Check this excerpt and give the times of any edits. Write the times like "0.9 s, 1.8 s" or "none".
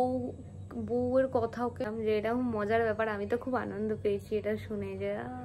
1.9 s